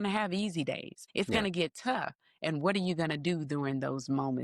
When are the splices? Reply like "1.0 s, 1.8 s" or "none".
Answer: 1.0 s